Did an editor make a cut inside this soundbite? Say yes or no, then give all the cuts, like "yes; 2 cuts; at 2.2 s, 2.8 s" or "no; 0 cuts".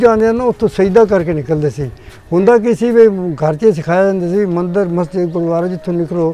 no; 0 cuts